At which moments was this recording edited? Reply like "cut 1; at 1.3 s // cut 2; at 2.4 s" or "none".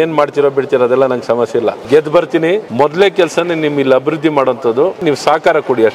cut 1; at 1.8 s // cut 2; at 2.7 s // cut 3; at 5.0 s

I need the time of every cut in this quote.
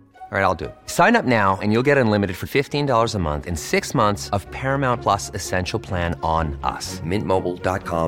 none

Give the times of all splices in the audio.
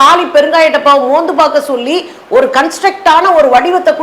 none

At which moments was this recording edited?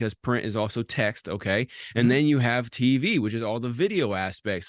none

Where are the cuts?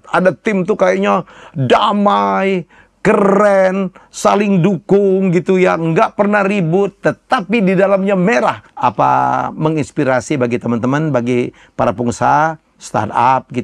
cut 1; at 8.7 s

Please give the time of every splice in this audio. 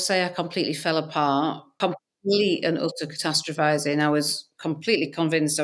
cut 1; at 1.8 s

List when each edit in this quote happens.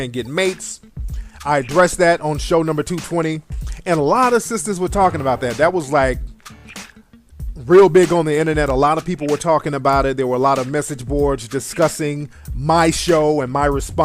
cut 1; at 4.0 s

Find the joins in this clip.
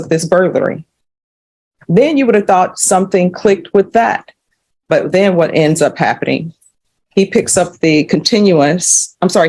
none

